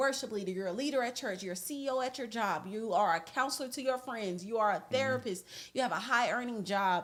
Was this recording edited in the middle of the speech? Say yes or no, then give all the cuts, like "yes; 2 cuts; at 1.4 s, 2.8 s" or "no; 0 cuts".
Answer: no; 0 cuts